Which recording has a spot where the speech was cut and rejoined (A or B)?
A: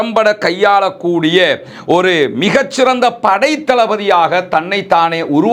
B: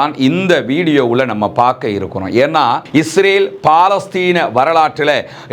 B